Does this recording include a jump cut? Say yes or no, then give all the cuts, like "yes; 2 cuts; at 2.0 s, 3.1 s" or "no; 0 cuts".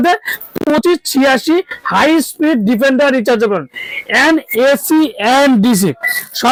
no; 0 cuts